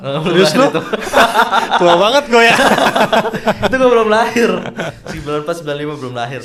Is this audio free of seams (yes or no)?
yes